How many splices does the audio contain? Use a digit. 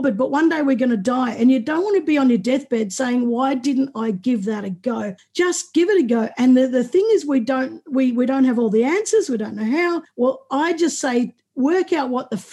2